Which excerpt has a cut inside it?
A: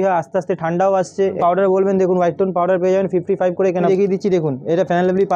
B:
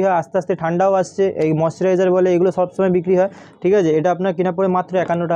A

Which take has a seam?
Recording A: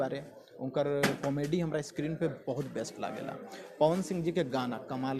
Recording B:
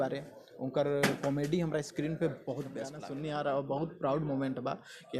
B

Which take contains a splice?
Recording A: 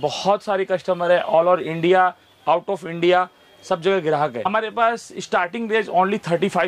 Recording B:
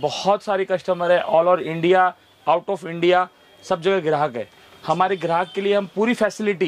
A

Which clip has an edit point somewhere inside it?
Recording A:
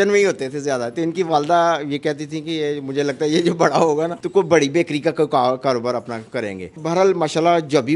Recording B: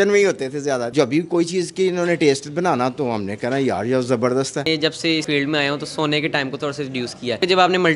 B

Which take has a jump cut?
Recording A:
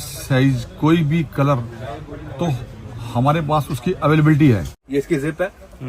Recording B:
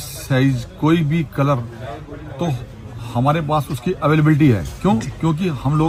A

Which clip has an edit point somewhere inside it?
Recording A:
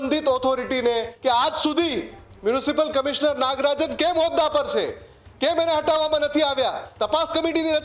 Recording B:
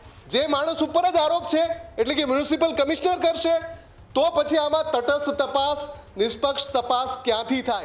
A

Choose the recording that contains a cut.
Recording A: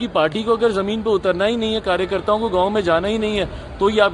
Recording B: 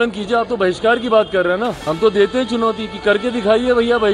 B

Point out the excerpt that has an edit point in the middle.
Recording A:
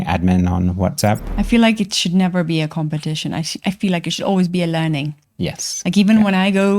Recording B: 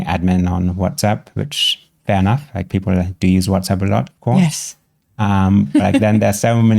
A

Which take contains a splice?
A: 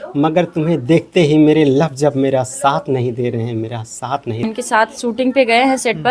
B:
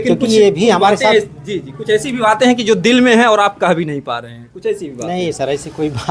A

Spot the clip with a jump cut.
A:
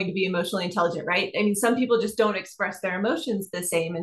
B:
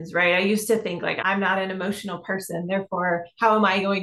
B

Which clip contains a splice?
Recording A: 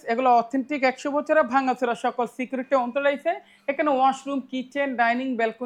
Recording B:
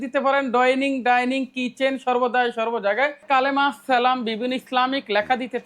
B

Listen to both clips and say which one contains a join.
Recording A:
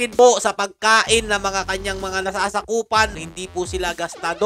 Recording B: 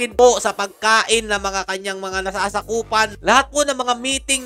A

